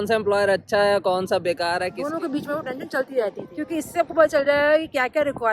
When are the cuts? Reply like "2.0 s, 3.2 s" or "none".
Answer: 2.0 s, 3.6 s